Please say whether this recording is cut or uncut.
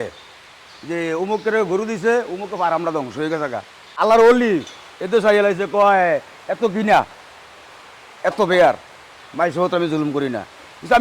cut